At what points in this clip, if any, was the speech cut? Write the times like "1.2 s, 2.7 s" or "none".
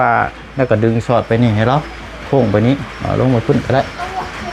none